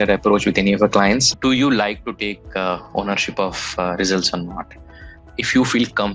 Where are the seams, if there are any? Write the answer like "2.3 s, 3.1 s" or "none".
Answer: 1.3 s